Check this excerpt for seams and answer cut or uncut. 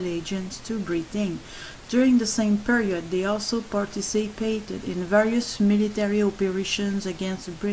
cut